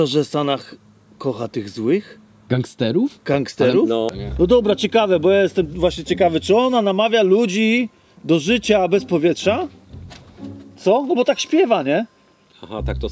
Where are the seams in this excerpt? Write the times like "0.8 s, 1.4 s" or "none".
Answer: 4.2 s